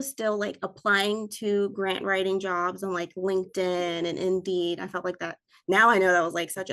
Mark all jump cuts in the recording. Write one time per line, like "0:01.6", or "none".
none